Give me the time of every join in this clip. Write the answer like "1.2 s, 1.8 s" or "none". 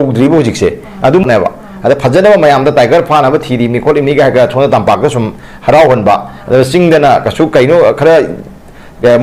1.2 s